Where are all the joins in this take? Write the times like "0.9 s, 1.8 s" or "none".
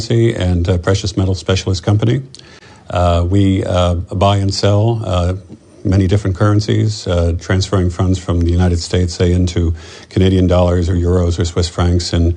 2.0 s